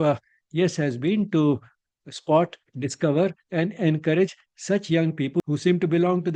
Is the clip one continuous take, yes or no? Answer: no